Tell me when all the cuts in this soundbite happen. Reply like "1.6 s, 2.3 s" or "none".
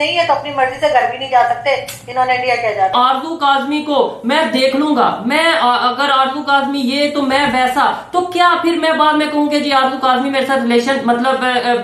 2.9 s